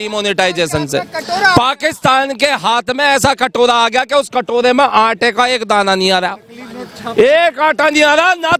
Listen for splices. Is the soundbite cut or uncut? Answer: uncut